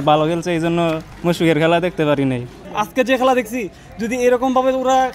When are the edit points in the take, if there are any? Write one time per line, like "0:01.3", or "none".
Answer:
0:01.1
0:02.7